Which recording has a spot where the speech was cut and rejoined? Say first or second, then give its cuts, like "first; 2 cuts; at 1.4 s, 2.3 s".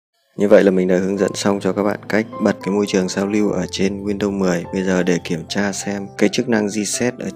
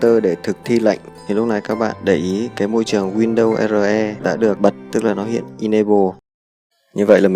second; 1 cut; at 1.1 s